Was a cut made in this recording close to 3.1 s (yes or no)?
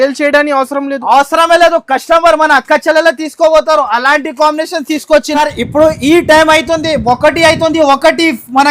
no